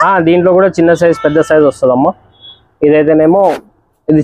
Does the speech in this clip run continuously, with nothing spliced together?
yes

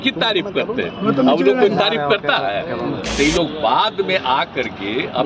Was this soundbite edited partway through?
yes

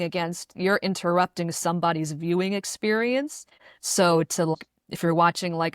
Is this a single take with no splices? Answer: no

